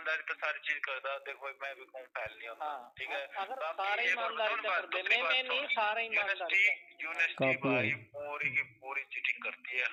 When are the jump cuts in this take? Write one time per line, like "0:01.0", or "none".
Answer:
none